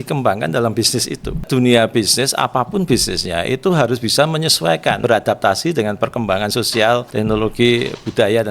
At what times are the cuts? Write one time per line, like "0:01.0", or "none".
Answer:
0:01.4
0:05.0
0:07.1